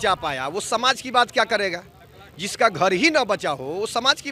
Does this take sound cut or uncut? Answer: uncut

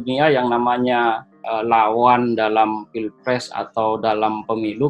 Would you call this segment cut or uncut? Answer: uncut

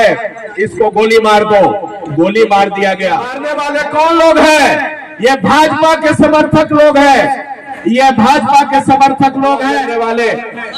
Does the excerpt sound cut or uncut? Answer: cut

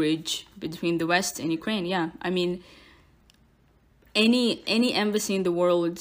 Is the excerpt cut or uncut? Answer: uncut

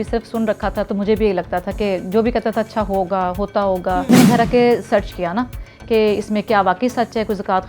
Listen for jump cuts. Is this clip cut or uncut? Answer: cut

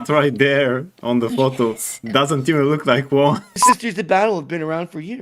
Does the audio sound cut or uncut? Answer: cut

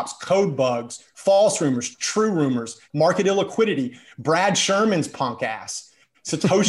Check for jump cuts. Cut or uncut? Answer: cut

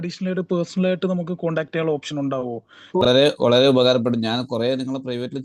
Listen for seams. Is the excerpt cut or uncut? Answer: cut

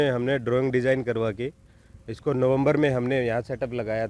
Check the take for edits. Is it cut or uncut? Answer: uncut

